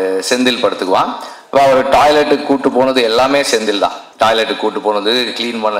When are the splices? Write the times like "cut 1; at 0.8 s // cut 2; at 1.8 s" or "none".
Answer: cut 1; at 4.0 s